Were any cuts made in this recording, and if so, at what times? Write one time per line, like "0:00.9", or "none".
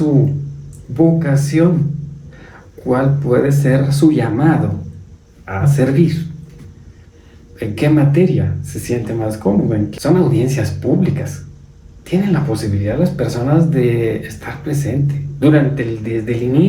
0:09.9